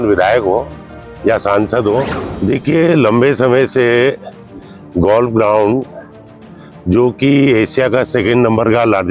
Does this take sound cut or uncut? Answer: cut